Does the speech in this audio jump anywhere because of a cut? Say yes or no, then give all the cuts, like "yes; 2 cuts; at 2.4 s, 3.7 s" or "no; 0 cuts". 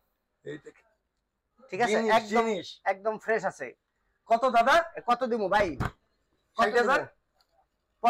no; 0 cuts